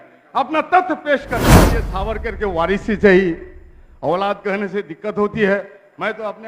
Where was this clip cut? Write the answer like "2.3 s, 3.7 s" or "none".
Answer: 1.8 s

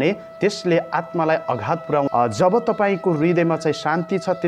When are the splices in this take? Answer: 2.1 s

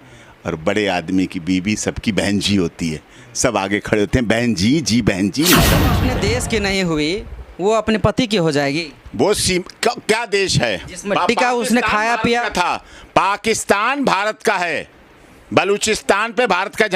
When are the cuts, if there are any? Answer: 6.0 s

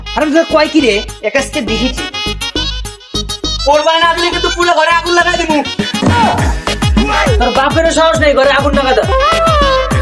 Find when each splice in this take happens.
none

